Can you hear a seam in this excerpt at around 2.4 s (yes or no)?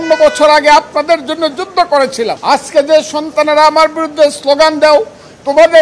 yes